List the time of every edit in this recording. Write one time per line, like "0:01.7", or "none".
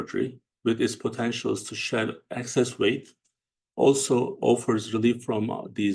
none